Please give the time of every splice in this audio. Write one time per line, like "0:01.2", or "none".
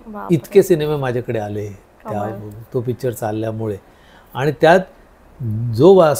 none

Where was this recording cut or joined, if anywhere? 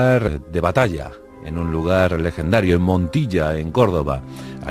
0:02.8

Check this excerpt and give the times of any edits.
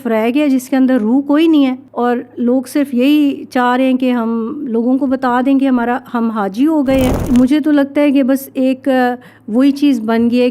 0:01.8
0:07.2

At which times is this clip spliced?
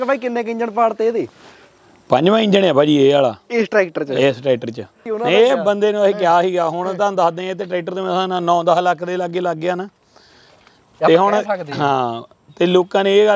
0:05.1

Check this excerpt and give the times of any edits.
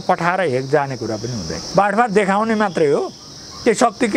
0:01.6

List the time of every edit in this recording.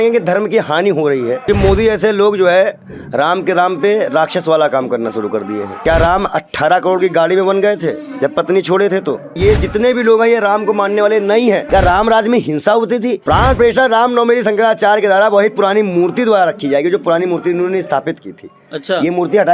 0:01.4
0:05.7
0:09.4
0:11.6
0:13.2

